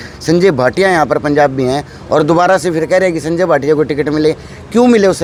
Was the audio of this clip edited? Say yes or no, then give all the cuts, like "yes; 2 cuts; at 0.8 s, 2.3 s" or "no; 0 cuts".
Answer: no; 0 cuts